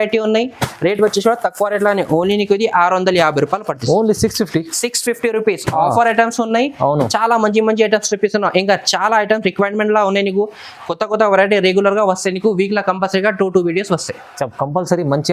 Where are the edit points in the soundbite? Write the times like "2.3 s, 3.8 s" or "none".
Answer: none